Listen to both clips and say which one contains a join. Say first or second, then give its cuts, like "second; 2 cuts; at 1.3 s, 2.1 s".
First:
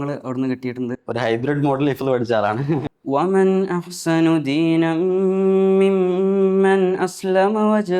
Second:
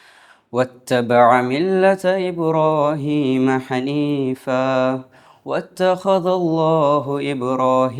first; 1 cut; at 2.8 s